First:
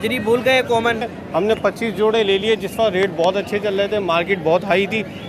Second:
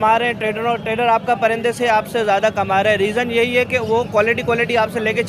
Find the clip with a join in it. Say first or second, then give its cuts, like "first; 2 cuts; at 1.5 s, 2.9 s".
first; 1 cut; at 1.2 s